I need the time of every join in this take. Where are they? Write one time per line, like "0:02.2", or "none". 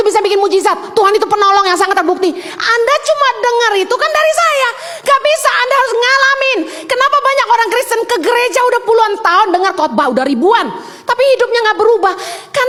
none